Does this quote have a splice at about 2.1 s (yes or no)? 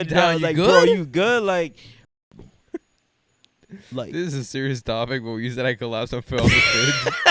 yes